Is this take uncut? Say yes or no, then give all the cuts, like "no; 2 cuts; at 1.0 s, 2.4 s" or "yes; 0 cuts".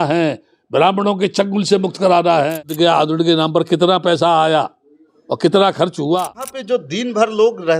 no; 2 cuts; at 2.6 s, 6.5 s